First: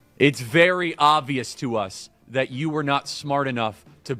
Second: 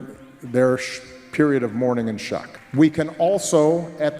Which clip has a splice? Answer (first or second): second